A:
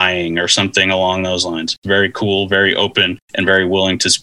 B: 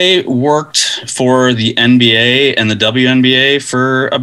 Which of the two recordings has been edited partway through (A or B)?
A